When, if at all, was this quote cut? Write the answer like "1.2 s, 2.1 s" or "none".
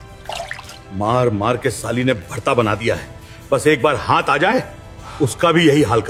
none